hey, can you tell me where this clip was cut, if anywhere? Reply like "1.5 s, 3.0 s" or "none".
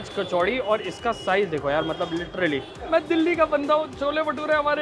2.7 s